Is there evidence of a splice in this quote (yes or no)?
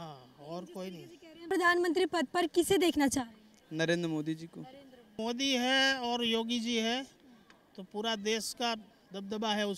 yes